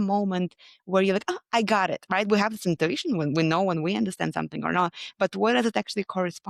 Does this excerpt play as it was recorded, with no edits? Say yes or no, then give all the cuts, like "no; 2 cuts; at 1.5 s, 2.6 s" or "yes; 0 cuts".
yes; 0 cuts